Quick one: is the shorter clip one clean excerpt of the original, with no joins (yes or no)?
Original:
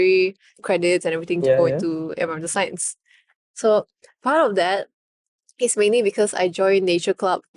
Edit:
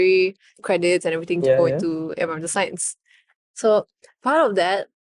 yes